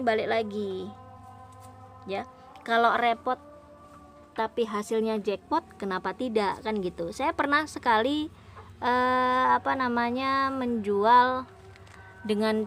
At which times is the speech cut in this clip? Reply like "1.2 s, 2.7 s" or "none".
none